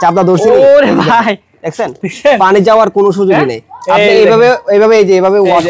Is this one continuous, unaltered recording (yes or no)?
yes